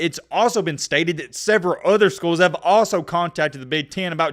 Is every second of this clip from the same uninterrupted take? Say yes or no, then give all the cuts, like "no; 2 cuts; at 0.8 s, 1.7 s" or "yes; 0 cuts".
yes; 0 cuts